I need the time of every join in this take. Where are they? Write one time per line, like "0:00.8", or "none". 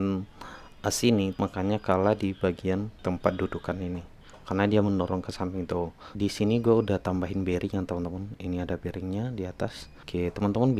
0:01.4
0:02.9
0:06.1
0:09.9